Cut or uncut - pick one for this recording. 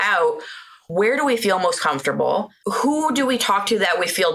cut